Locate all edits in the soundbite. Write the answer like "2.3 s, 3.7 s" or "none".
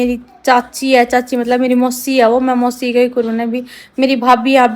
none